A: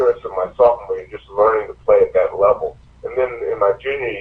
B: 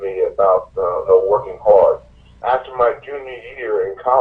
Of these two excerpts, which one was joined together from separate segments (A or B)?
B